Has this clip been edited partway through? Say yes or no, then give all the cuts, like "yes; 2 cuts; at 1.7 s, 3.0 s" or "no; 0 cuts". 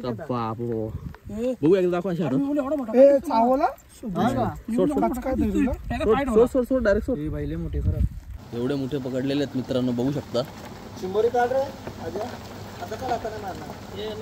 yes; 1 cut; at 8.4 s